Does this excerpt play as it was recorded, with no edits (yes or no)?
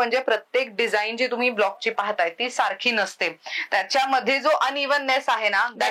yes